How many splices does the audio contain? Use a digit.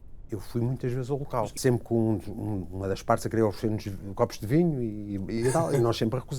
1